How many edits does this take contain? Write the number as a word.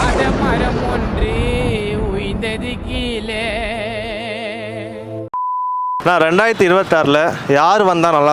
one